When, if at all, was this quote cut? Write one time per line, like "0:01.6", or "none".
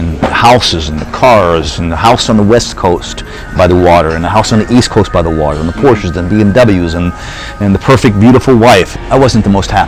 0:08.9